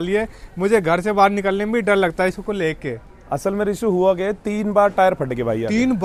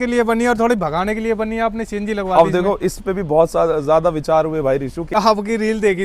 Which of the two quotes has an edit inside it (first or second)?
second